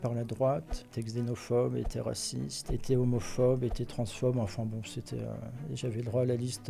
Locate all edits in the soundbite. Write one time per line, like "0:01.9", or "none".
none